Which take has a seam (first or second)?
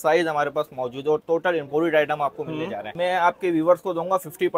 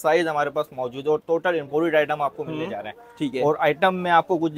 first